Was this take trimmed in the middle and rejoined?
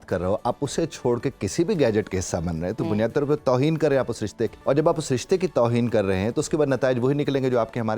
yes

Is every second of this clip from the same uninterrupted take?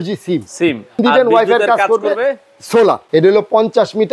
no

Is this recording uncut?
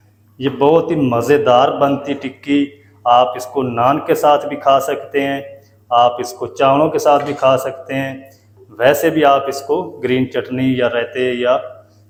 yes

